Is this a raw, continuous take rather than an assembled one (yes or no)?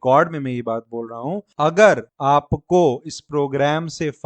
no